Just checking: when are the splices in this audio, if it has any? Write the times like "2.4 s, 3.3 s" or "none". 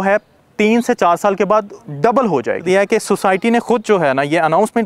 2.6 s